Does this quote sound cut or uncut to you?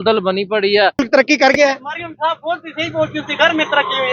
cut